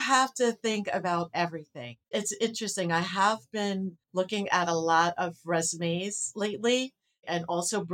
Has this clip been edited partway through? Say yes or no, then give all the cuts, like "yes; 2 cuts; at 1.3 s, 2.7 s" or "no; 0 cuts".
yes; 2 cuts; at 2.0 s, 4.0 s